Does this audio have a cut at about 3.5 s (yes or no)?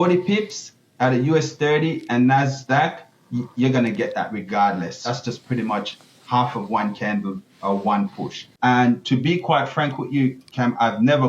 no